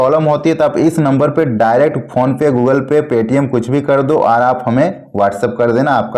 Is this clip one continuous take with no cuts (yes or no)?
yes